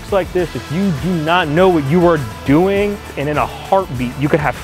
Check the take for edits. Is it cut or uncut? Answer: cut